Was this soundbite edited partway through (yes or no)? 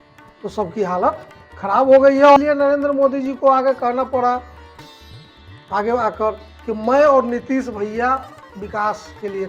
yes